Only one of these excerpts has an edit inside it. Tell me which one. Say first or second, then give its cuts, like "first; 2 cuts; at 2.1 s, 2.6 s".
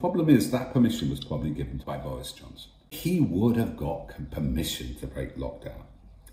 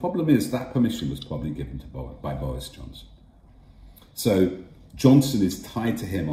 first; 2 cuts; at 1.8 s, 2.9 s